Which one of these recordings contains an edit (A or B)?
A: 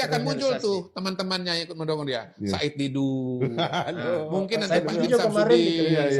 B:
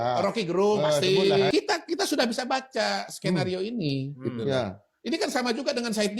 B